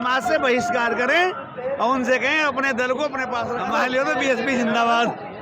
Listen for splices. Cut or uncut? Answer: cut